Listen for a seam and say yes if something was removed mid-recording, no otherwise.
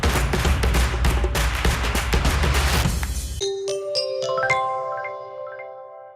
yes